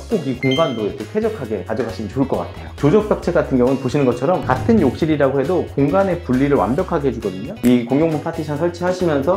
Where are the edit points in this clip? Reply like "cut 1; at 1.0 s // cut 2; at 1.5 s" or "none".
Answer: cut 1; at 2.7 s // cut 2; at 7.6 s